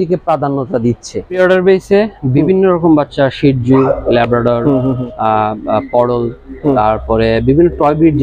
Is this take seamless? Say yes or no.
no